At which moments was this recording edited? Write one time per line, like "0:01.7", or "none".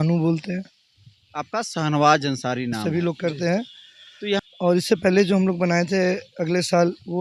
0:02.8